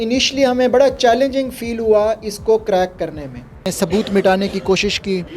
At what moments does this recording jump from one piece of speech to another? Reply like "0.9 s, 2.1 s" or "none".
3.7 s